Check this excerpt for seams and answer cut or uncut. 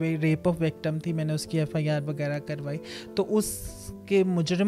uncut